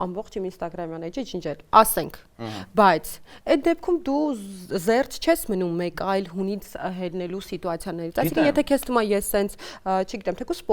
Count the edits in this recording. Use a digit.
0